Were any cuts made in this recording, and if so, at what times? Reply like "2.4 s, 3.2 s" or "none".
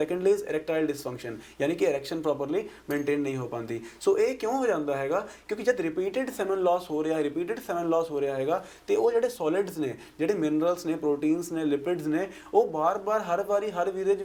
none